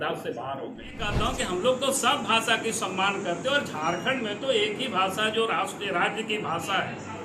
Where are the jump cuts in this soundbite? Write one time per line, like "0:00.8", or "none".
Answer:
0:01.1